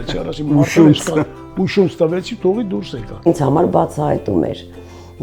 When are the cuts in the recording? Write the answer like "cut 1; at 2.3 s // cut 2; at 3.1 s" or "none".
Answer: cut 1; at 3.3 s